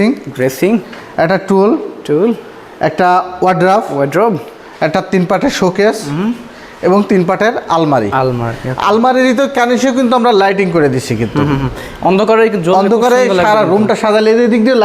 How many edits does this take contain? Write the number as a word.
zero